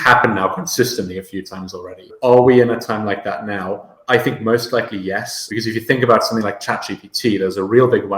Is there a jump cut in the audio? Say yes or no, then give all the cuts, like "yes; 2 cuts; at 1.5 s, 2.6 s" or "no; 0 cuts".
yes; 3 cuts; at 2.1 s, 3.9 s, 5.4 s